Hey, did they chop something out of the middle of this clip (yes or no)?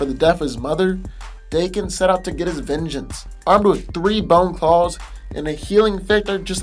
yes